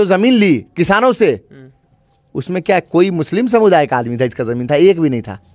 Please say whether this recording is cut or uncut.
uncut